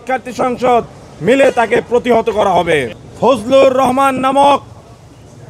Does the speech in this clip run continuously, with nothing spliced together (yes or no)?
no